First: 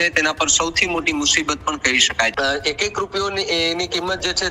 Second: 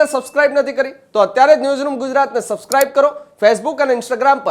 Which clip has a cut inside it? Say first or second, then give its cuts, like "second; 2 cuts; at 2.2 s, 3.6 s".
first; 1 cut; at 2.3 s